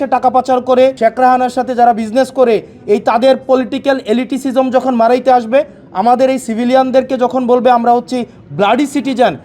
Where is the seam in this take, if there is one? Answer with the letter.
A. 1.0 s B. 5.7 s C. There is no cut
A